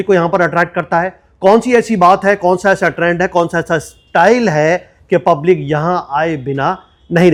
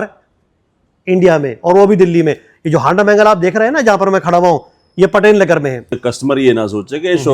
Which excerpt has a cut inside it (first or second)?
second